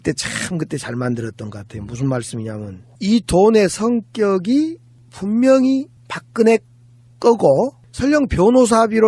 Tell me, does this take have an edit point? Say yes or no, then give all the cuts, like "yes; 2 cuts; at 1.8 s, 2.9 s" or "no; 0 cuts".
yes; 1 cut; at 1.5 s